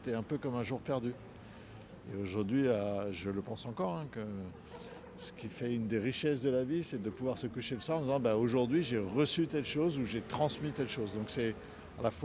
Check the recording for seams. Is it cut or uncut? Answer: uncut